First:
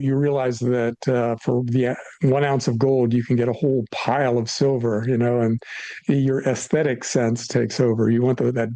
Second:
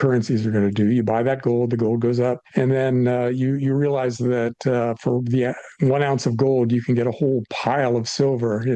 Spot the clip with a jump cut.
second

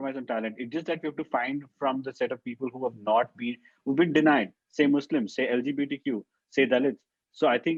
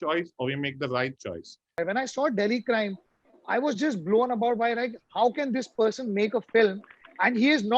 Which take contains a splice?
second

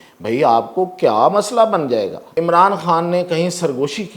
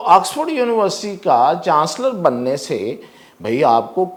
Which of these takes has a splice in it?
first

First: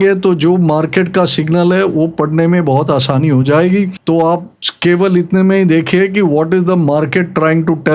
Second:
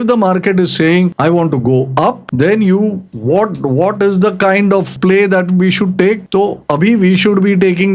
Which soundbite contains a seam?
second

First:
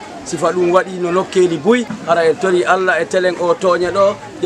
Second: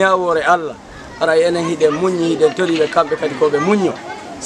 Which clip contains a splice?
first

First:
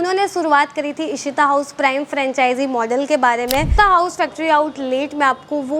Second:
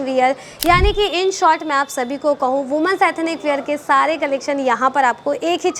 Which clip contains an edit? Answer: first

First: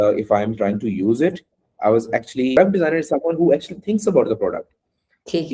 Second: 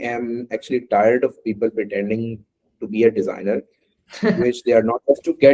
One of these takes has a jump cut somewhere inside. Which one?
first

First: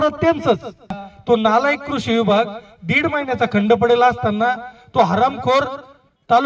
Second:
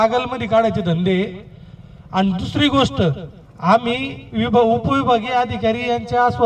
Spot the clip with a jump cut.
first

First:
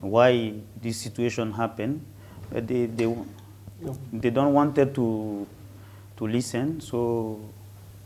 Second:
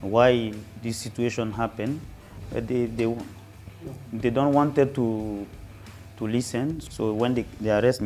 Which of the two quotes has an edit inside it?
second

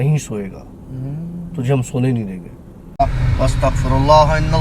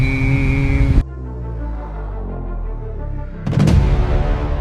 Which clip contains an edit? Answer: first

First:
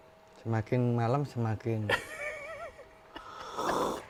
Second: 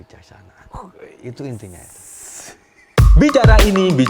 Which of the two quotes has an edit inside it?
second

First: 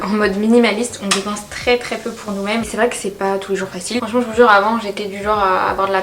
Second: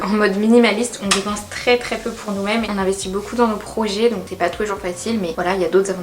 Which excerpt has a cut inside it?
first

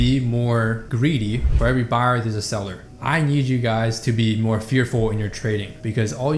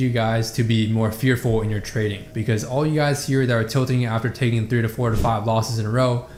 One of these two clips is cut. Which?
first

